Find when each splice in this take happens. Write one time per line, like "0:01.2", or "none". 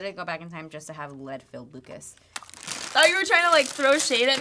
0:02.9